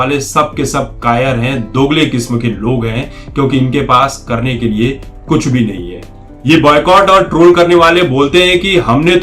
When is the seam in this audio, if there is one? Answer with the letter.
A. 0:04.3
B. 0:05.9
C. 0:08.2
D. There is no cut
B